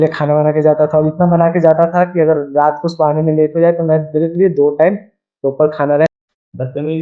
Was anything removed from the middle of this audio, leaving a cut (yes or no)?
yes